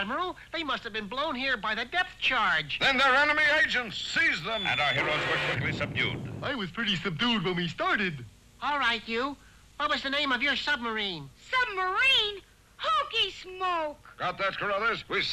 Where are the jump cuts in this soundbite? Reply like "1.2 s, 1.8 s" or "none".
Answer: none